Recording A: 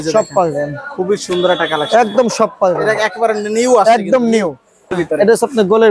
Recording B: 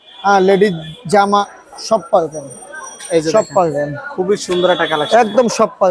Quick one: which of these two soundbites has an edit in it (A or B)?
A